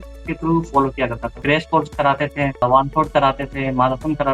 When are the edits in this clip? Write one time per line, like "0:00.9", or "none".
0:01.4
0:02.6